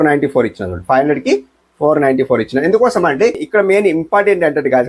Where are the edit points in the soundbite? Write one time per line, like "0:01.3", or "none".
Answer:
0:03.4

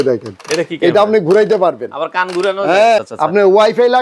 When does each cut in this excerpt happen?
0:03.0

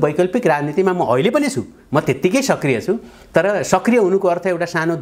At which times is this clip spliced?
none

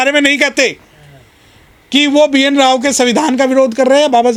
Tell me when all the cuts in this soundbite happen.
none

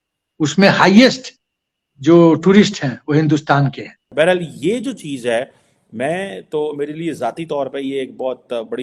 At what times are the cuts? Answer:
0:04.0

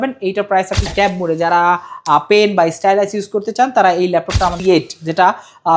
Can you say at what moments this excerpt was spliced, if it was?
0:00.9
0:04.6

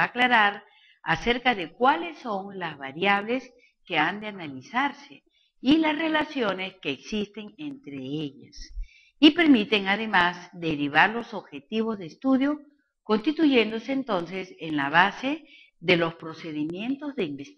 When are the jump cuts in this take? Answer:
none

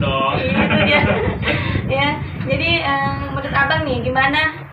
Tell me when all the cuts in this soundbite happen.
none

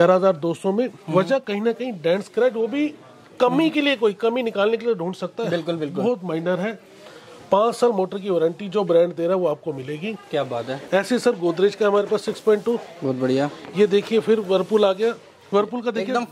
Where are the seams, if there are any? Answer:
none

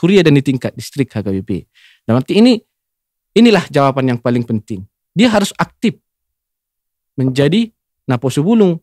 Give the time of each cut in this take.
none

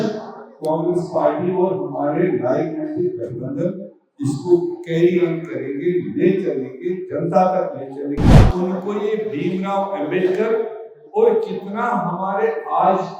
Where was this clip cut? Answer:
0:08.4

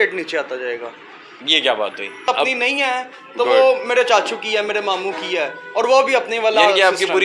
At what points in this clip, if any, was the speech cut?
0:02.3

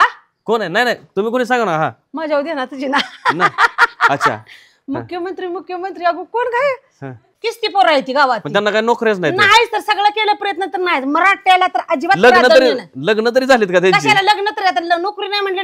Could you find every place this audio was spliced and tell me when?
0:07.3

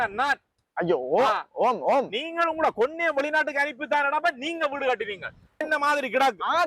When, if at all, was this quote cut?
0:05.6

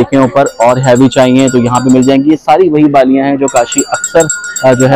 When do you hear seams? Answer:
none

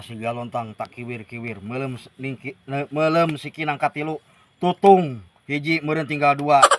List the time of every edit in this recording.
none

